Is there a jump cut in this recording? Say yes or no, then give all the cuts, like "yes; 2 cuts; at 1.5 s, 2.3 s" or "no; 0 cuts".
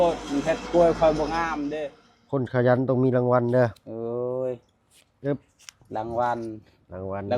yes; 1 cut; at 1.8 s